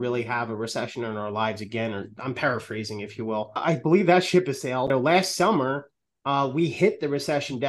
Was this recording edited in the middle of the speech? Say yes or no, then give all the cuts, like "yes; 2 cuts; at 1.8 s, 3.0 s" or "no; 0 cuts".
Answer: yes; 2 cuts; at 3.6 s, 4.9 s